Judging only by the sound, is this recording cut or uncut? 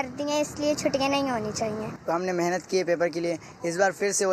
cut